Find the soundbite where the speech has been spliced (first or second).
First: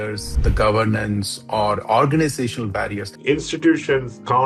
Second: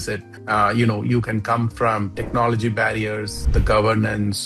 first